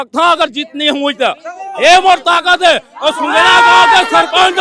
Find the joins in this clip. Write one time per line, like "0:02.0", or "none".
none